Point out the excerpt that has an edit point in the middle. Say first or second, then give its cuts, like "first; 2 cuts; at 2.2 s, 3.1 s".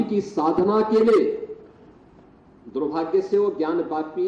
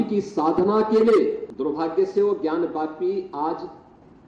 second; 1 cut; at 1.5 s